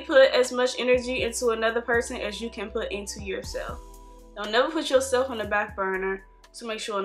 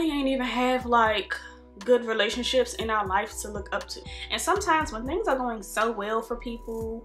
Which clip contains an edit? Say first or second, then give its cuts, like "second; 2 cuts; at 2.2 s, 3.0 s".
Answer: second; 1 cut; at 4.0 s